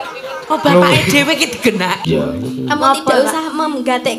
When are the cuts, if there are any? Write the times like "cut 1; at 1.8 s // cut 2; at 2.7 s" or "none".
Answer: cut 1; at 2.0 s